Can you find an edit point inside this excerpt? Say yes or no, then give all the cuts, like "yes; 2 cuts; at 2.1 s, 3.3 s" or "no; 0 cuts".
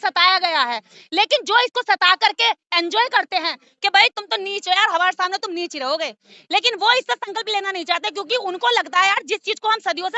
no; 0 cuts